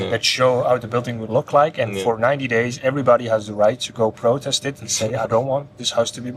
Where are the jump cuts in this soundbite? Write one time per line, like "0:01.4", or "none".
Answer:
none